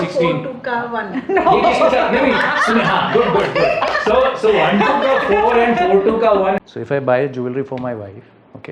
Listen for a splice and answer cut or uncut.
cut